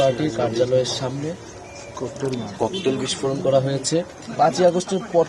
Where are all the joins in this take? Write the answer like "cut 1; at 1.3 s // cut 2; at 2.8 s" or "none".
cut 1; at 4.2 s